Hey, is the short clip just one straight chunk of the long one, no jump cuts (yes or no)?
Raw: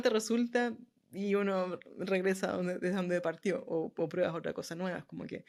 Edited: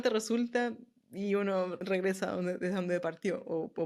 no